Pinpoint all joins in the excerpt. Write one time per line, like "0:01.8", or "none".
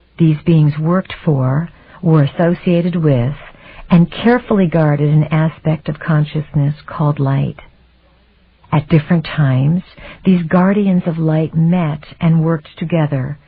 0:03.6